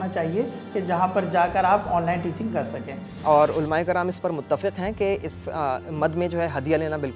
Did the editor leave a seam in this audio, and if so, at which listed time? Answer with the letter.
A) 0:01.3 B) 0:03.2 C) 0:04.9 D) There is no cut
B